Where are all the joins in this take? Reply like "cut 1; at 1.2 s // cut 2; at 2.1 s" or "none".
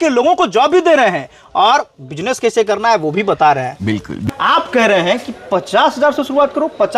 cut 1; at 4.1 s